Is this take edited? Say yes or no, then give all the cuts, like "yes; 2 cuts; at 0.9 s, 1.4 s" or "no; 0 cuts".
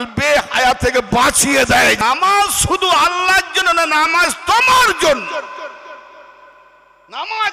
yes; 1 cut; at 2.0 s